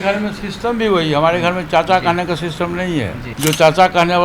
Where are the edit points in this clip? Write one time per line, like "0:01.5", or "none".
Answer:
0:03.2